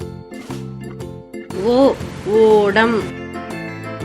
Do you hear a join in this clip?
yes; 2 cuts; at 1.6 s, 3.0 s

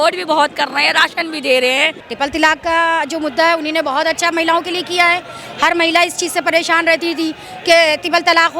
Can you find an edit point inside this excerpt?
yes; 1 cut; at 2.0 s

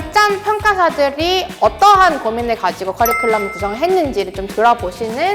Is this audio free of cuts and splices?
yes; 0 cuts

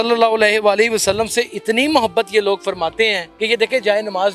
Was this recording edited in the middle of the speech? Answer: yes; 1 cut; at 3.3 s

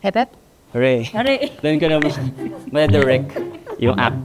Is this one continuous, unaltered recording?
yes; 0 cuts

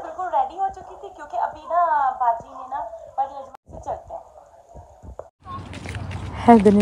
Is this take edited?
yes; 2 cuts; at 3.5 s, 5.4 s

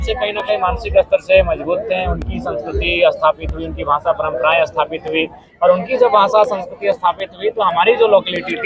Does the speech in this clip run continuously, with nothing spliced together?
yes; 0 cuts

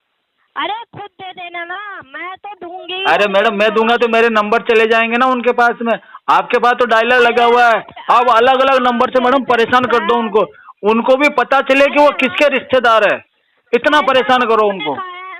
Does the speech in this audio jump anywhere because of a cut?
no; 0 cuts

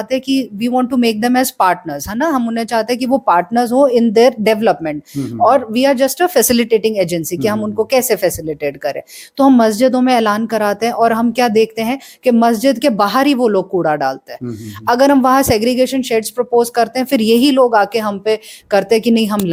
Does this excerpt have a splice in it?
no; 0 cuts

